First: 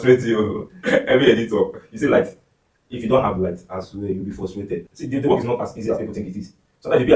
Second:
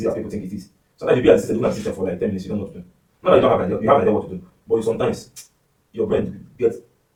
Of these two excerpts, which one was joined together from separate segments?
first; 1 cut; at 4.9 s

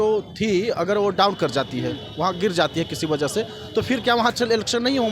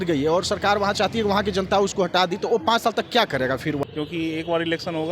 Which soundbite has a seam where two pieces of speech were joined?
second; 1 cut; at 3.8 s

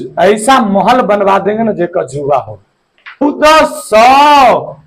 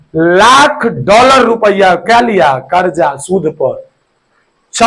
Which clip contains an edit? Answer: first; 1 cut; at 3.2 s

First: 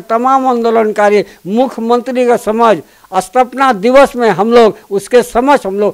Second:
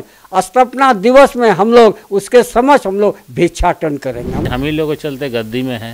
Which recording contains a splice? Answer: second; 1 cut; at 4.5 s

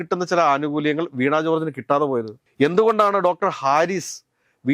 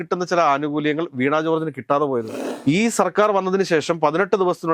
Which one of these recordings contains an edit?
second; 1 cut; at 2.4 s

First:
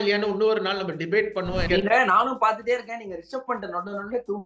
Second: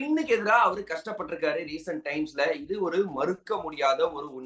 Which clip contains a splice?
first; 1 cut; at 1.6 s

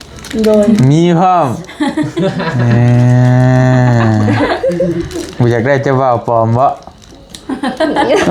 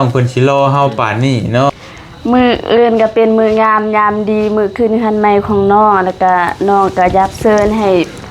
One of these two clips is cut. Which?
second; 1 cut; at 1.7 s

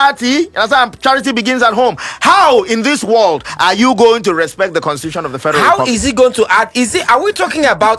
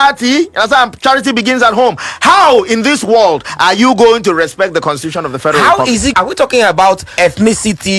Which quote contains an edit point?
second; 2 cuts; at 6.1 s, 7.1 s

